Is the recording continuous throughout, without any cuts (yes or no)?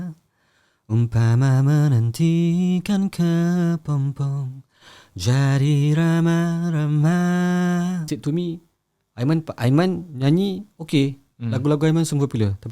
no